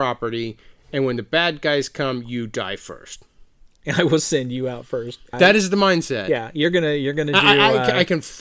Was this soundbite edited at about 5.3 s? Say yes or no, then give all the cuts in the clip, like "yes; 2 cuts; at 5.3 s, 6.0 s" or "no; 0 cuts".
yes; 1 cut; at 5.3 s